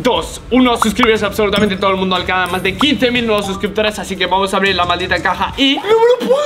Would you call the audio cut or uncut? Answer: uncut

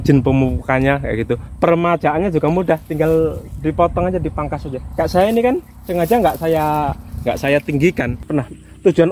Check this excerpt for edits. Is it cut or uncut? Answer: cut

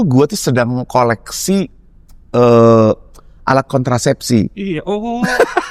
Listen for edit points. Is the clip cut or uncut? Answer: uncut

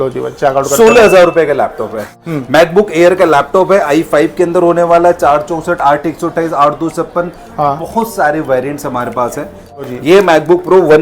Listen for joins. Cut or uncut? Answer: cut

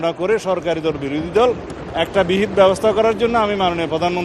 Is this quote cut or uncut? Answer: uncut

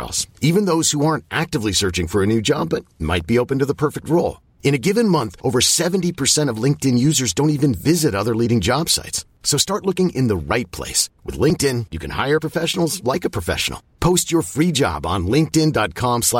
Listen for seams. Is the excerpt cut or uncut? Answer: uncut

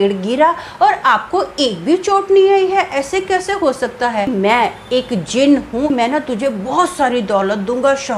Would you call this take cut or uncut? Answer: cut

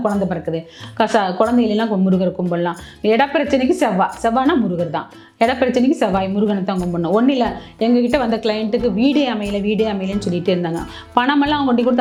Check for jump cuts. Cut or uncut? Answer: uncut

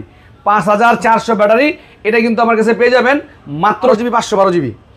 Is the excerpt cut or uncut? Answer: cut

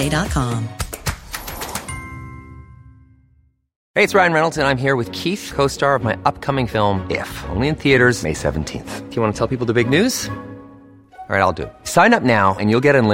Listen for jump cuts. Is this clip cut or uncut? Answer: cut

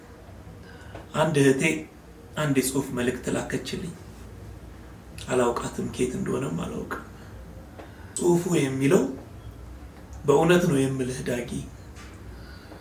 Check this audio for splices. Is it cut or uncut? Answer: cut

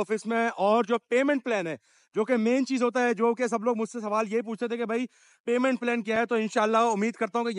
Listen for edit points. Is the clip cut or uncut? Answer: uncut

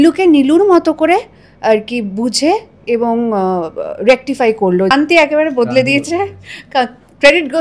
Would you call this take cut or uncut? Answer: cut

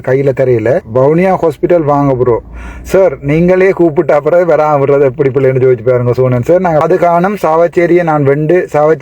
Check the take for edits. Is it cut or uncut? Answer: cut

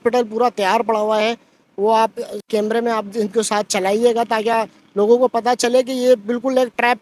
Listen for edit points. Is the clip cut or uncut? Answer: uncut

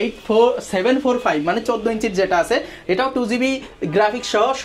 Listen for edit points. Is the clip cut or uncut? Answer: uncut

